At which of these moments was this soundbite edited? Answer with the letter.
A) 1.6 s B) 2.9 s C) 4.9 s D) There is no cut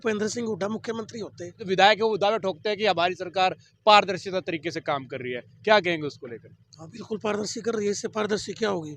A